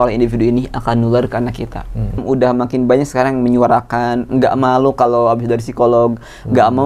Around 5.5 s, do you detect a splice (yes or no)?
no